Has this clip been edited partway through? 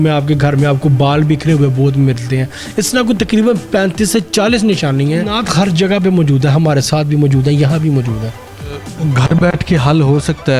yes; 2 cuts; at 5.3 s, 8.9 s

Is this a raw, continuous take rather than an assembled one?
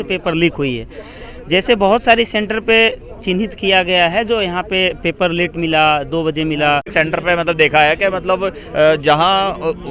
no; 1 cut; at 6.9 s

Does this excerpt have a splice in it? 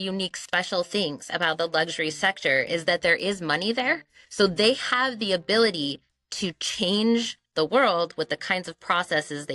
no; 0 cuts

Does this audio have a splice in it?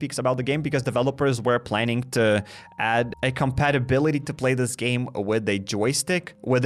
no; 0 cuts

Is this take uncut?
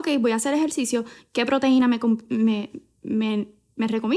yes; 0 cuts

